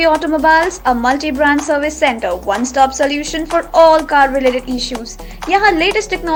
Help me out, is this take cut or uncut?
uncut